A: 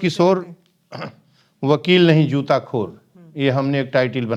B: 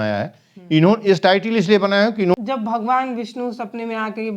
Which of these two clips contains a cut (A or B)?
B